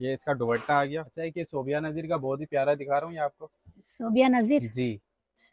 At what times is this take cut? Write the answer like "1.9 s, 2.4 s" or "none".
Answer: 1.1 s